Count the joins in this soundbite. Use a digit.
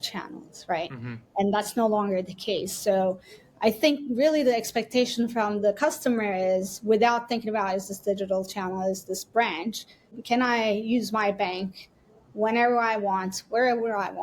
1